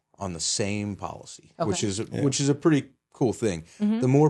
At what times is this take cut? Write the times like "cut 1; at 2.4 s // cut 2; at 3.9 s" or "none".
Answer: none